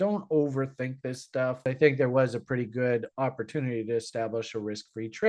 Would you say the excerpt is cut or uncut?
cut